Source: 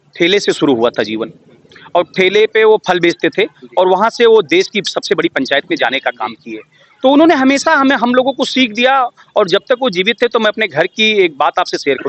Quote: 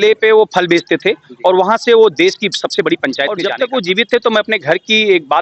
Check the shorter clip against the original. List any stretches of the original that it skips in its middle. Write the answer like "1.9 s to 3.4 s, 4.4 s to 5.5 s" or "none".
5.8 s to 9.6 s